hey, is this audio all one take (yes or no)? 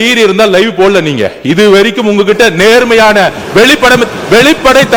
yes